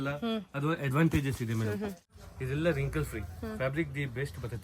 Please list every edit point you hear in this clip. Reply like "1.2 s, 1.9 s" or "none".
2.0 s